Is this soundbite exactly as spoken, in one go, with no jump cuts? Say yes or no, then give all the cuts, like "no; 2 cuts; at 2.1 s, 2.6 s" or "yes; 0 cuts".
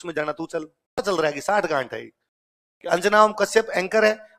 no; 1 cut; at 1.0 s